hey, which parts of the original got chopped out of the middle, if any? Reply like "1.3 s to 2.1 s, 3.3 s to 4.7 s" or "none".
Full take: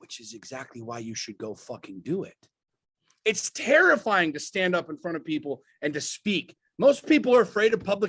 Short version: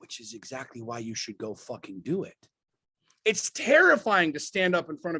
none